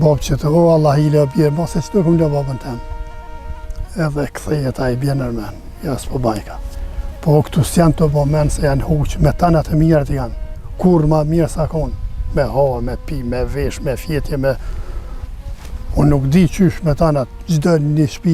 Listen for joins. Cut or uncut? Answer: uncut